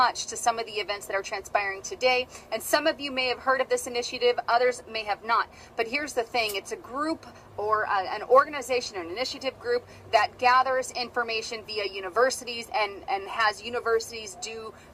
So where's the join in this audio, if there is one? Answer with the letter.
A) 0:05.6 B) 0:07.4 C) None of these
C